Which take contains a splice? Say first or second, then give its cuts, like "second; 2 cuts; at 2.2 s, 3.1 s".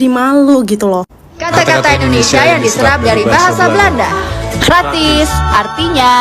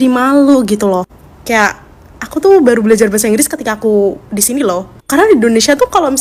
first; 1 cut; at 1.5 s